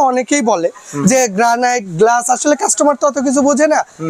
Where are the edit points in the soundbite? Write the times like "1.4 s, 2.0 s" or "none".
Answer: none